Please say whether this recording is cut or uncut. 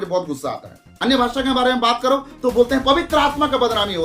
cut